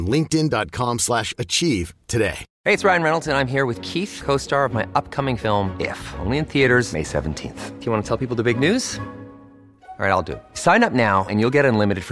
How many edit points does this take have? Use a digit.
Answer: 1